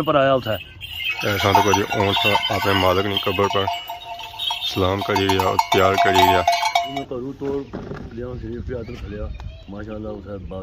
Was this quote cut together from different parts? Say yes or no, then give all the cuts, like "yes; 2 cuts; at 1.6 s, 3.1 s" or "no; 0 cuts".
yes; 1 cut; at 6.9 s